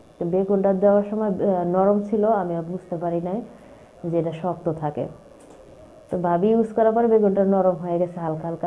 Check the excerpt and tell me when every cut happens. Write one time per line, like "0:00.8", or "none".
none